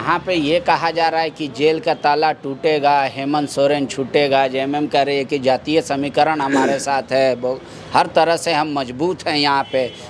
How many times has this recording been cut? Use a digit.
0